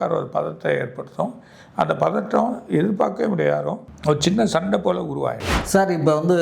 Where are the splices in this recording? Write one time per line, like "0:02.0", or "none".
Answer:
0:03.9
0:05.5

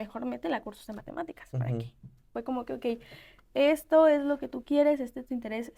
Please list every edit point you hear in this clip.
0:02.3

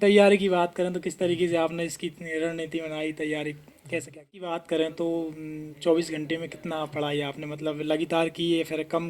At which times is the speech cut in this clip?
0:04.6

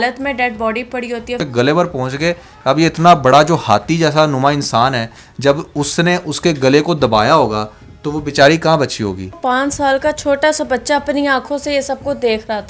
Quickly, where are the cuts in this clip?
0:01.5
0:09.4

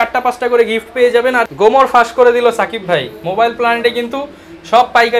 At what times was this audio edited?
0:01.4

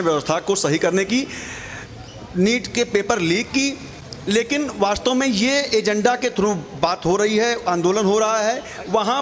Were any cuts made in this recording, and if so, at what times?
none

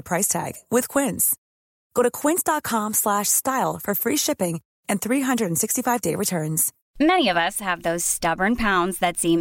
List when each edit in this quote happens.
0:06.7

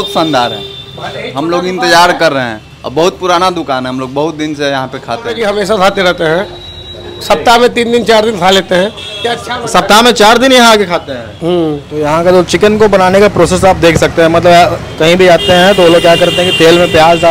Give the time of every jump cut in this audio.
none

